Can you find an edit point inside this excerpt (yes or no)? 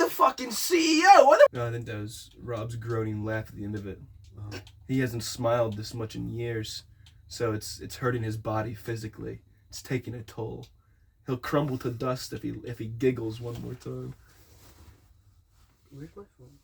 yes